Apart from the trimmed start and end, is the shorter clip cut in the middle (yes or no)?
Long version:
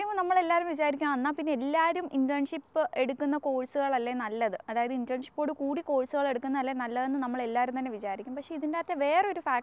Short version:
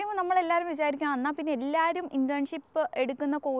no